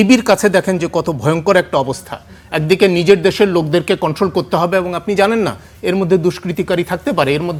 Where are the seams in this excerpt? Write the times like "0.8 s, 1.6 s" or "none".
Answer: none